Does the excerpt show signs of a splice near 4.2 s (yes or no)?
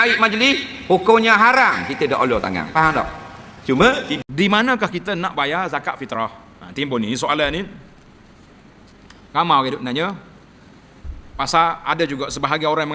yes